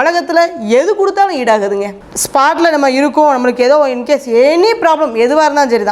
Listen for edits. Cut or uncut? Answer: cut